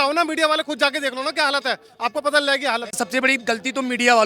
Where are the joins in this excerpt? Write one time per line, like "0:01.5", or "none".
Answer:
0:02.9

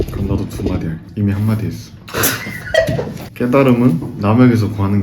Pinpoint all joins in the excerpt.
0:03.3

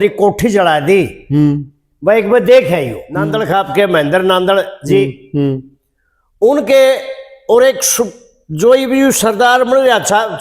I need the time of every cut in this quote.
0:03.4

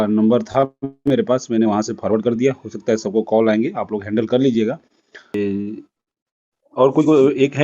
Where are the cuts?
0:05.4

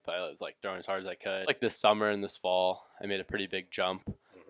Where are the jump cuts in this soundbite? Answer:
0:01.4

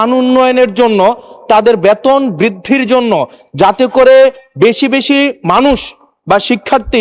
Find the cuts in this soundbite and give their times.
none

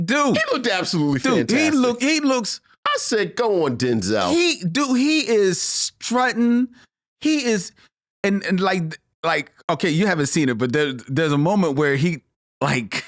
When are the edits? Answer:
none

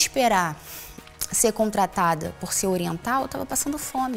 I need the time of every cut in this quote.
none

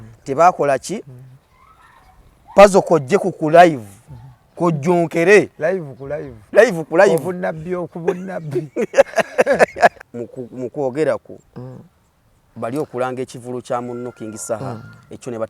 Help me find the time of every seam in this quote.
0:10.0

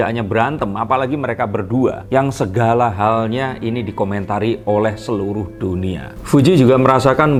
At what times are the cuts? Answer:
none

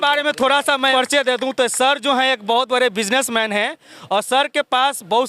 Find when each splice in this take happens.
0:00.9

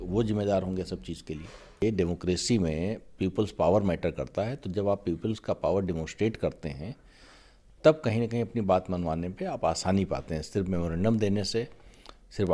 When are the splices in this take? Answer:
0:01.8

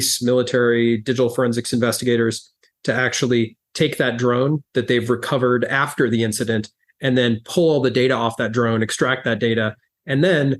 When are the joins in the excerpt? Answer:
none

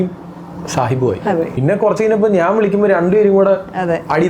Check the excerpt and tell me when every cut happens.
0:01.5

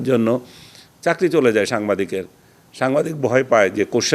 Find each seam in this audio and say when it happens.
none

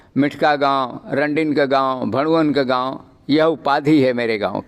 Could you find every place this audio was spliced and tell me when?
none

